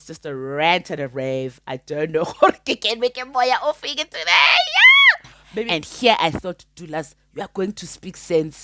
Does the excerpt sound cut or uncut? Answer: cut